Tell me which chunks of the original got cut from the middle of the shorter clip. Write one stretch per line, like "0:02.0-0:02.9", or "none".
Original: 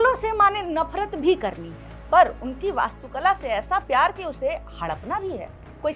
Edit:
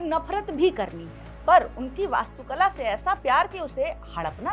none